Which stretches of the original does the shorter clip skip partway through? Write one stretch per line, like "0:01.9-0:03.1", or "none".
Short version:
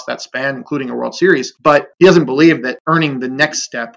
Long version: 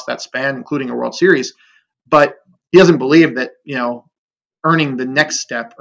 0:01.8-0:02.5
0:03.5-0:04.6